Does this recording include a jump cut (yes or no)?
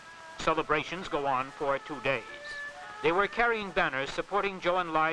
no